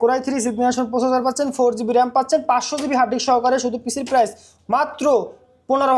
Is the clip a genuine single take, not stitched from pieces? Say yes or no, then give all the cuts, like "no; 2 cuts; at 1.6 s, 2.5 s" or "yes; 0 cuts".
yes; 0 cuts